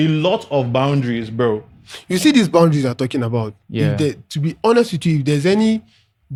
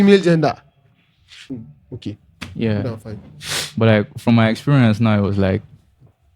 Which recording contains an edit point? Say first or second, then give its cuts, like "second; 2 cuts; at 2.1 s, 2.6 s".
second; 1 cut; at 1.5 s